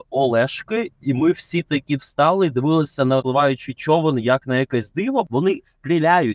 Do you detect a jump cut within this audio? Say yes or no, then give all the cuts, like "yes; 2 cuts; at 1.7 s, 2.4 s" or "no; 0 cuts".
yes; 2 cuts; at 3.2 s, 5.3 s